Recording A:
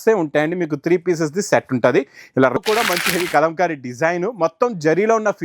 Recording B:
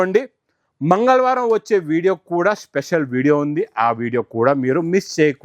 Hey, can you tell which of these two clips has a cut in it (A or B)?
A